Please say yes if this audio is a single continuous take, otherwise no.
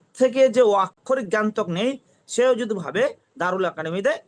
yes